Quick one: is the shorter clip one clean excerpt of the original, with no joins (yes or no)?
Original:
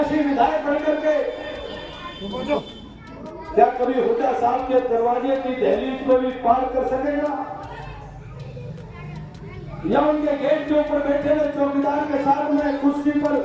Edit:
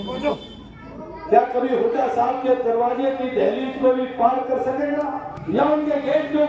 no